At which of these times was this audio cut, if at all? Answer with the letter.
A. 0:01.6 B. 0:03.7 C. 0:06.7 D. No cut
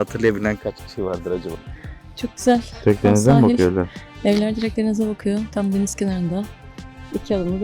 A